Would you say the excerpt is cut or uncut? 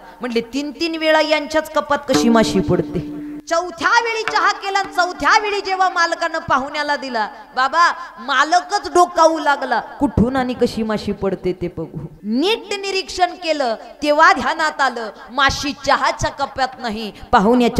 cut